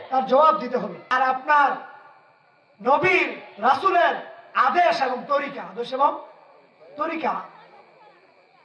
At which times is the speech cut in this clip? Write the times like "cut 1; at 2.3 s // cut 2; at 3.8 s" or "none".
cut 1; at 1.0 s